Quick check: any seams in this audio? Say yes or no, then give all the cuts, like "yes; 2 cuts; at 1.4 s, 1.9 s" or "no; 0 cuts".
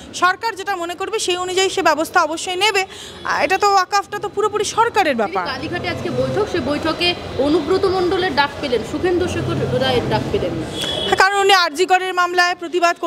no; 0 cuts